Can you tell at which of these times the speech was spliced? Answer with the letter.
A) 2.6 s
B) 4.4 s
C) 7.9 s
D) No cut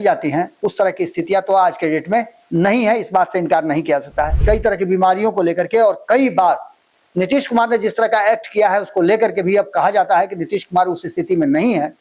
B